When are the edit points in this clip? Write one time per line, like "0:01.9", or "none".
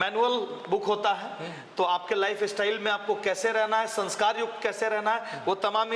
none

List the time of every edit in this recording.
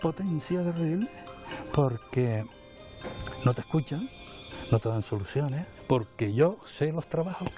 none

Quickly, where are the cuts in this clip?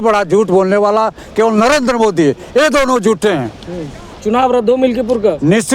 0:04.2

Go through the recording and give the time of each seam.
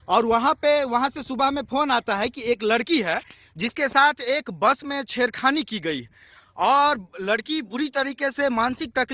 0:05.1

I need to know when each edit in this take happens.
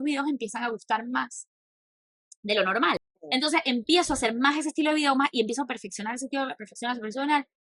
0:03.0

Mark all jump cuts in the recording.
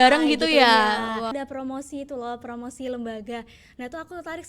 0:01.3

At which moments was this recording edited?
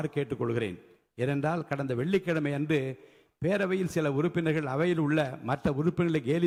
none

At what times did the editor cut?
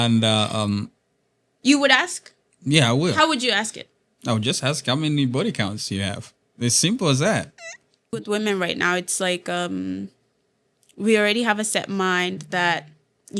0:08.1

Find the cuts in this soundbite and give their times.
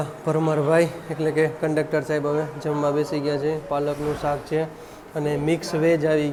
none

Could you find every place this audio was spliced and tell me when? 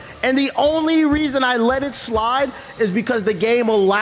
none

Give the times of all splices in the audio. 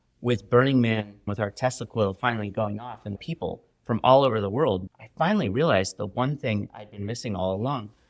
0:01.2
0:03.2
0:04.9

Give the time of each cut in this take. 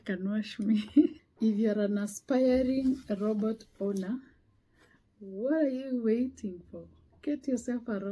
0:01.2

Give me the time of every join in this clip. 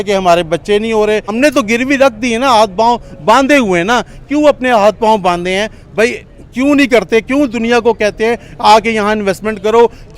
0:01.3

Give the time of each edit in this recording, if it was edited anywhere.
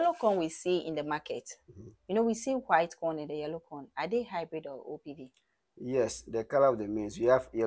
none

